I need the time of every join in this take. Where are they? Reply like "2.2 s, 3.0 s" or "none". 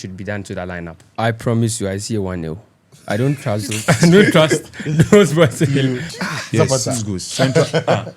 0.9 s, 6.1 s